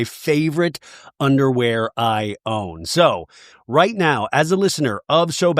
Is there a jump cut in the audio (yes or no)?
yes